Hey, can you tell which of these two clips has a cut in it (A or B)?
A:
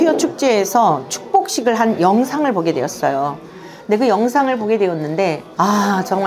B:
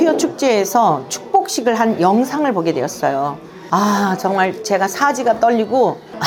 B